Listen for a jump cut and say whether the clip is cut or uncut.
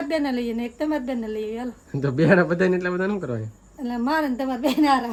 uncut